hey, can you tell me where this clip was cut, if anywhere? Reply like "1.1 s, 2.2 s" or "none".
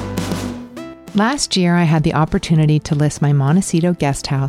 1.0 s